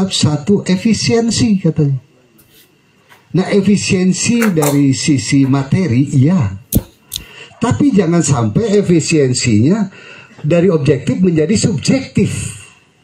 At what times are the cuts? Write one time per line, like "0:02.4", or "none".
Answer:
none